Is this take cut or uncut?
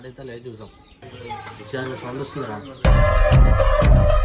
cut